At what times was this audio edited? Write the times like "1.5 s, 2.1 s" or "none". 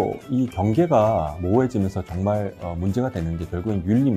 none